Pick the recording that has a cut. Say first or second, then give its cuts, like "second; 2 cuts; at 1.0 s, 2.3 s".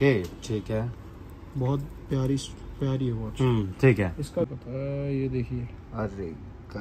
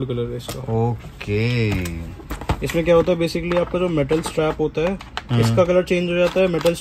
first; 1 cut; at 4.5 s